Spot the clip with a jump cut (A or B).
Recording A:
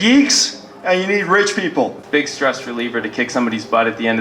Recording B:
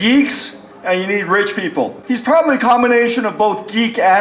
A